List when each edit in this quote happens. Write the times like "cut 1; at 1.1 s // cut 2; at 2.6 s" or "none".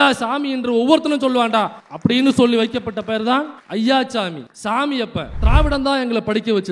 cut 1; at 5.3 s